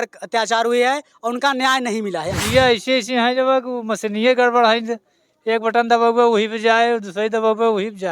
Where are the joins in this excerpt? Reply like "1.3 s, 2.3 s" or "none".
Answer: 2.4 s